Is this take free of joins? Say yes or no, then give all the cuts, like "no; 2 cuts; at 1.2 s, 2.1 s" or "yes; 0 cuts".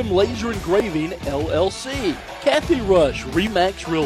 no; 1 cut; at 2.3 s